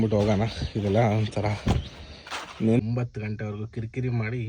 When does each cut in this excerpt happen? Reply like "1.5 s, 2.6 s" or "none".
2.8 s